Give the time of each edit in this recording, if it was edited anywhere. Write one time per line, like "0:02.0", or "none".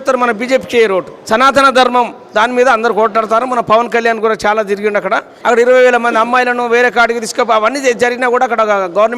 0:01.1
0:05.3